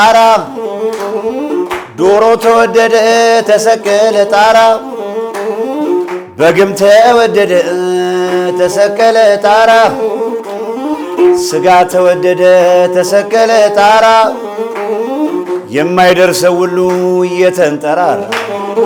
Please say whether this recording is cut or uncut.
uncut